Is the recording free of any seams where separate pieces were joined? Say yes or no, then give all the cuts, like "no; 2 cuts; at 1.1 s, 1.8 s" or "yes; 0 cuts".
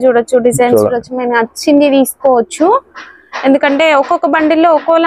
yes; 0 cuts